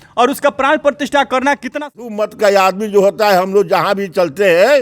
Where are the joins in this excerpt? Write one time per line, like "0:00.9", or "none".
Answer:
0:02.1

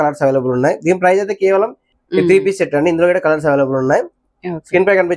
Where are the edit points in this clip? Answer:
0:01.9

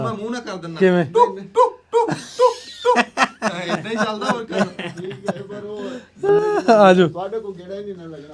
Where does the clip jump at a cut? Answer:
none

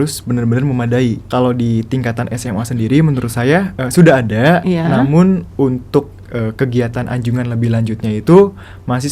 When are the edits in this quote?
0:01.2

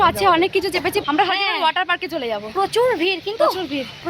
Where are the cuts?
none

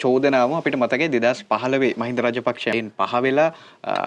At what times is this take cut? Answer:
0:02.7

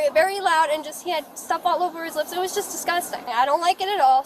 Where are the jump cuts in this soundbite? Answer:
0:03.3

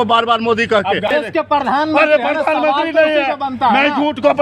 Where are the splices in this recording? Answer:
0:01.2

